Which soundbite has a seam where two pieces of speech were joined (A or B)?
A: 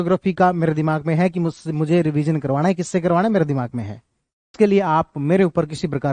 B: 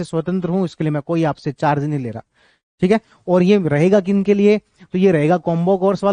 A